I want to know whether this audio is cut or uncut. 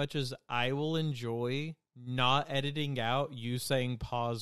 uncut